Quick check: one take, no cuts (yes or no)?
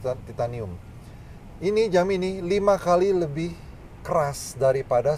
yes